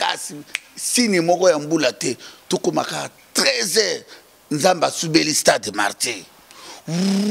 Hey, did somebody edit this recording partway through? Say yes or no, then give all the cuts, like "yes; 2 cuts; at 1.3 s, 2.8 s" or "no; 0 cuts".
no; 0 cuts